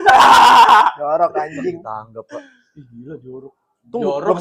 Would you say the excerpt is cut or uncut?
uncut